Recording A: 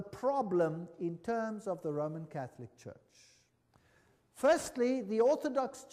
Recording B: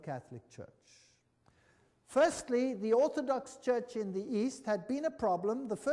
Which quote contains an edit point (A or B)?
B